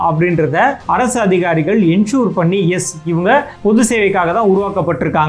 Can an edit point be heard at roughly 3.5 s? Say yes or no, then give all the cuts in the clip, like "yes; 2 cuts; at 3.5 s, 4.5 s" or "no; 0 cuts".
yes; 2 cuts; at 0.8 s, 3.5 s